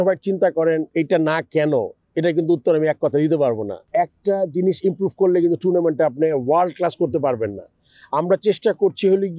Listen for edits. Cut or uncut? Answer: cut